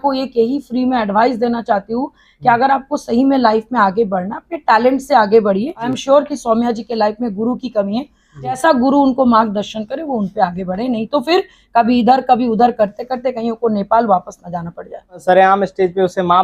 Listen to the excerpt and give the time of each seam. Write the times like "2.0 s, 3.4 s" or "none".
5.9 s, 8.6 s, 15.2 s